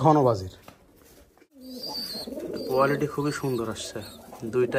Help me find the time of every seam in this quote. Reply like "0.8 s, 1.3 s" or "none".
1.6 s